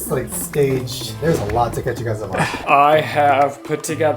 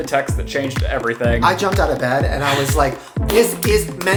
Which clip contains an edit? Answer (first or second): first